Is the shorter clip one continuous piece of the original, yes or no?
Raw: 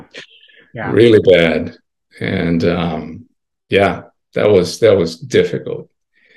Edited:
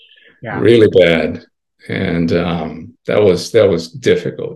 no